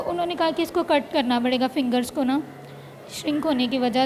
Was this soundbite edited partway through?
no; 0 cuts

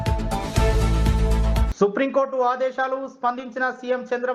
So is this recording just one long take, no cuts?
yes; 0 cuts

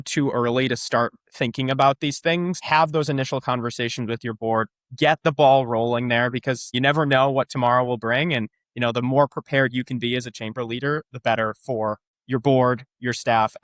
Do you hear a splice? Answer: yes; 3 cuts; at 2.6 s, 6.7 s, 12.1 s

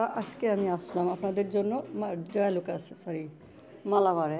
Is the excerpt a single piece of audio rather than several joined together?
yes; 0 cuts

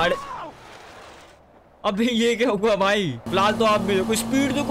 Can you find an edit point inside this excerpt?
yes; 1 cut; at 3.2 s

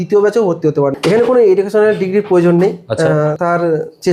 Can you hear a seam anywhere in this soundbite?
yes; 2 cuts; at 1.0 s, 3.4 s

